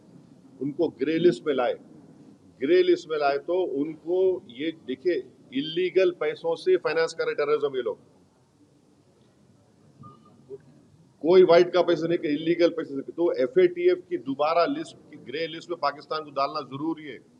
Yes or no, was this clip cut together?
no